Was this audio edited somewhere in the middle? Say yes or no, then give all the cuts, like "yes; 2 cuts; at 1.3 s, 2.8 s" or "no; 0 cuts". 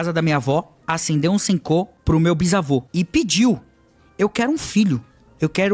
yes; 2 cuts; at 1.9 s, 2.9 s